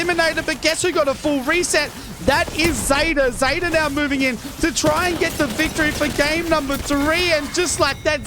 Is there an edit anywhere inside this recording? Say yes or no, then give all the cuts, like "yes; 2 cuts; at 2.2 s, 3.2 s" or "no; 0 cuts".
no; 0 cuts